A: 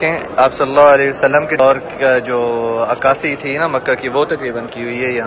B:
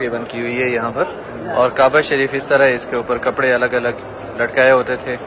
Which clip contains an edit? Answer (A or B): A